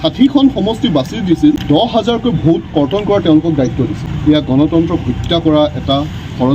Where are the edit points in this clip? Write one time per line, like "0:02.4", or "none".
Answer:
0:01.6
0:04.1